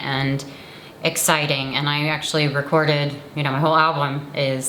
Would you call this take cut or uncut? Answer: uncut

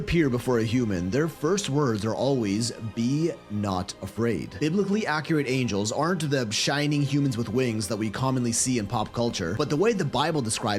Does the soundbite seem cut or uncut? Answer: uncut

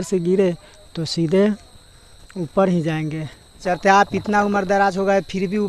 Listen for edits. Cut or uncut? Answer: cut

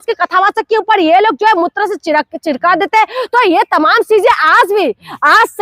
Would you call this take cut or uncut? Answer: uncut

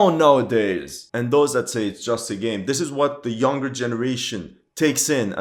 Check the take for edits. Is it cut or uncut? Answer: uncut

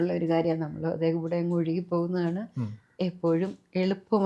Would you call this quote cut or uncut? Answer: uncut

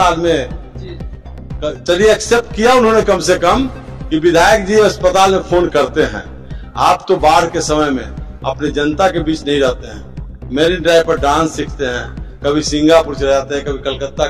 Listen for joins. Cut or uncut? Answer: uncut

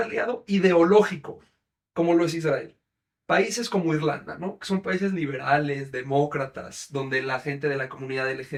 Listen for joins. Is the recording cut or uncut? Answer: uncut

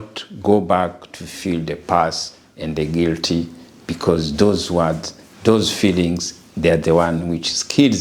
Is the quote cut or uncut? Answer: uncut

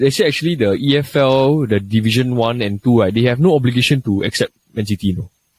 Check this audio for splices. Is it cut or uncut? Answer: uncut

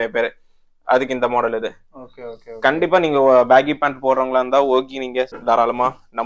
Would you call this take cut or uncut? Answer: cut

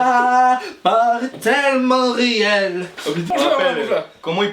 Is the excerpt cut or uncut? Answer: cut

